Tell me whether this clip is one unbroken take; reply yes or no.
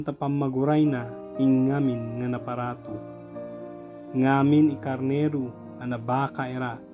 no